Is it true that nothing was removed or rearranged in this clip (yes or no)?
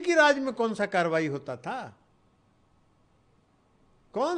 yes